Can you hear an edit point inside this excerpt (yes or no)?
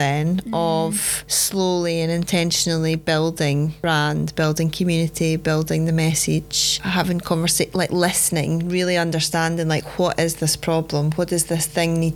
no